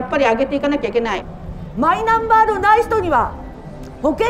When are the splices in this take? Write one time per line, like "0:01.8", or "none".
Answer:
0:01.2